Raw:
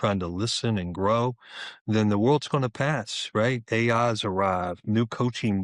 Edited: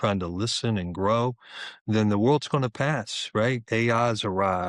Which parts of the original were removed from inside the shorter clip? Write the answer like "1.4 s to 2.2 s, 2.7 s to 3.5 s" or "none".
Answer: none